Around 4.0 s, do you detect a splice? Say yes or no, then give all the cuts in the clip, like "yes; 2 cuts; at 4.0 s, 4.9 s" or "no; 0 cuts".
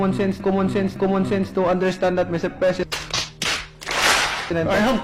no; 0 cuts